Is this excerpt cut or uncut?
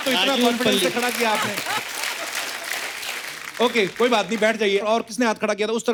uncut